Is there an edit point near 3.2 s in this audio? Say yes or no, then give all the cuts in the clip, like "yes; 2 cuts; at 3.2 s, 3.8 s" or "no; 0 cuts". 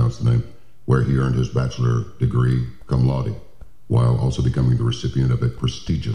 yes; 1 cut; at 3.2 s